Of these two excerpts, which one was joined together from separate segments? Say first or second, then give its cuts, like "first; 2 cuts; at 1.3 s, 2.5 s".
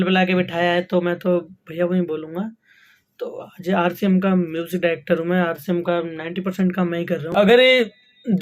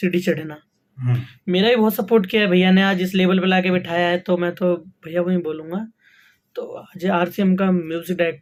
first; 1 cut; at 7.2 s